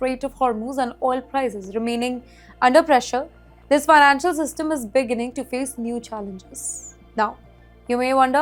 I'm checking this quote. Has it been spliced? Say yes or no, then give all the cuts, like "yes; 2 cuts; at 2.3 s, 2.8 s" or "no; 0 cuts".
no; 0 cuts